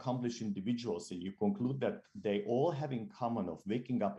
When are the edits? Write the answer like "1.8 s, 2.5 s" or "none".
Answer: none